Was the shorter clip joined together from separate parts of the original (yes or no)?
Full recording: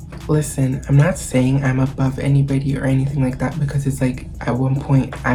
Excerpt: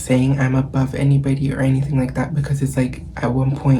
no